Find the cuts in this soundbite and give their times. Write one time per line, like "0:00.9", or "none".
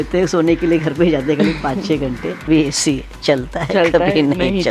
0:02.5